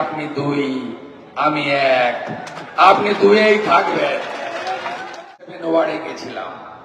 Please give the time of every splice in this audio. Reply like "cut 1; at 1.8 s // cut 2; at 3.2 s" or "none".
cut 1; at 5.4 s